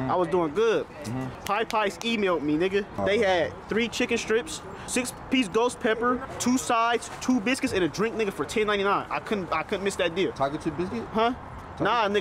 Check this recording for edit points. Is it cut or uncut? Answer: cut